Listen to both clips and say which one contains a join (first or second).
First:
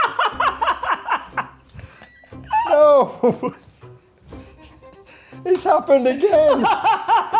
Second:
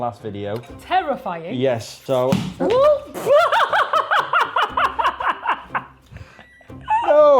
second